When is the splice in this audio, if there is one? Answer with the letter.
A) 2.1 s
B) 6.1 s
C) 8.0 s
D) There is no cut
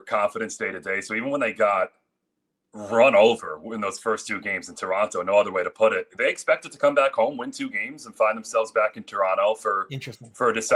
D